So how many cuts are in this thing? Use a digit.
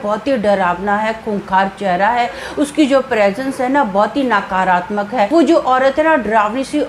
1